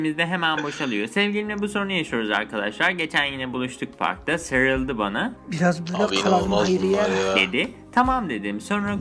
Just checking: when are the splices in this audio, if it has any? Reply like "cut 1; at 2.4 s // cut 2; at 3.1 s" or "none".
cut 1; at 1.2 s

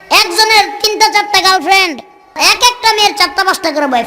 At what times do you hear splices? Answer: cut 1; at 2.4 s

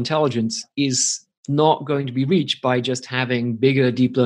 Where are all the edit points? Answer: none

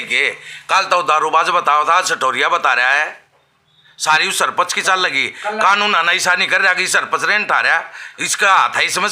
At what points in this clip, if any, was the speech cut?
none

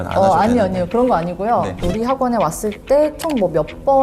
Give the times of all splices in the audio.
cut 1; at 1.8 s

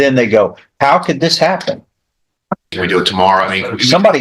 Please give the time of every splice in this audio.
cut 1; at 2.7 s

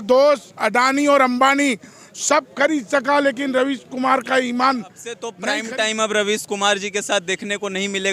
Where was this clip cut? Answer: cut 1; at 5.3 s

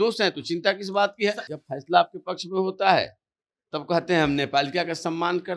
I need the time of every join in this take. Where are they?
cut 1; at 1.5 s

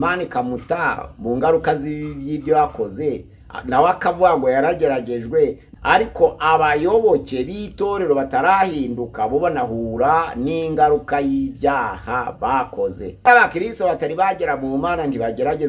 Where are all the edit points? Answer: cut 1; at 5.6 s // cut 2; at 13.2 s

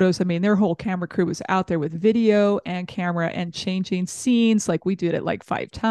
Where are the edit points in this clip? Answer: none

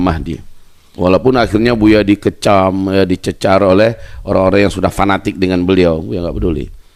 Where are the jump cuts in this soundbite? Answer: none

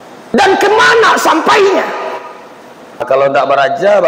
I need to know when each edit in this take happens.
cut 1; at 3.0 s

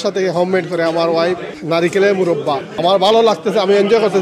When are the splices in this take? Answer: cut 1; at 1.5 s // cut 2; at 2.7 s

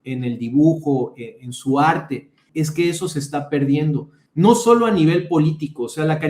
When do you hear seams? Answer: cut 1; at 2.4 s // cut 2; at 4.2 s

